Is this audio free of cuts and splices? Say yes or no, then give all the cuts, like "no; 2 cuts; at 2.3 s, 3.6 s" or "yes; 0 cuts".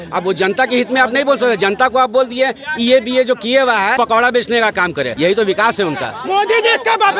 no; 3 cuts; at 3.9 s, 5.1 s, 6.2 s